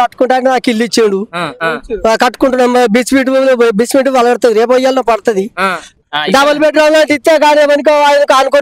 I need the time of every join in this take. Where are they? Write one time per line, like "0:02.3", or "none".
0:01.5
0:06.0